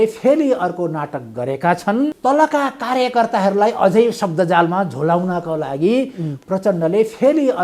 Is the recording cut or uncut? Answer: cut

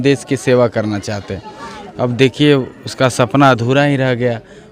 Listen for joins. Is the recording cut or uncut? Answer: uncut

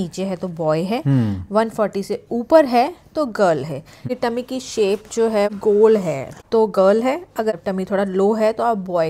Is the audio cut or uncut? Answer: cut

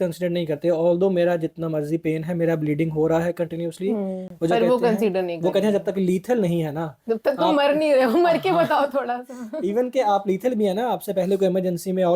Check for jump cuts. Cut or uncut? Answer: uncut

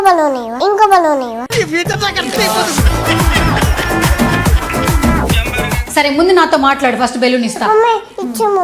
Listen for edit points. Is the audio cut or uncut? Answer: cut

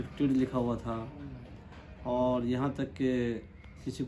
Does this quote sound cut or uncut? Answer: uncut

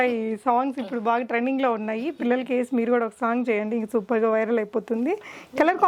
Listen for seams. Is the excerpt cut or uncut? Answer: uncut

